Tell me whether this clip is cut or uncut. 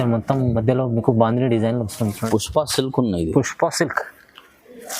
cut